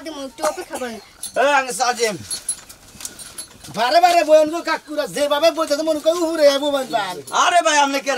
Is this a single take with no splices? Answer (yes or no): no